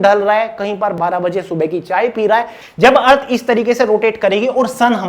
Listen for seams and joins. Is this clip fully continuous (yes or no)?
no